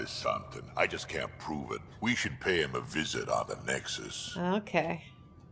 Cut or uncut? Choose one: uncut